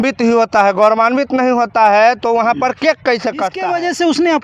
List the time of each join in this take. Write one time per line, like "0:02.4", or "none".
0:03.5